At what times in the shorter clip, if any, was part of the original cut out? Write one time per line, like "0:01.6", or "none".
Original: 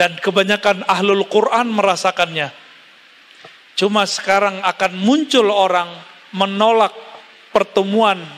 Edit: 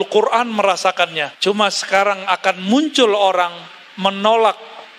0:01.3

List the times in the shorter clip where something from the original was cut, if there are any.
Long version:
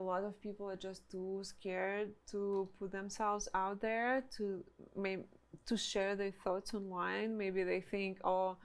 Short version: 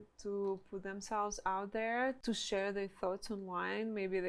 0:02.2

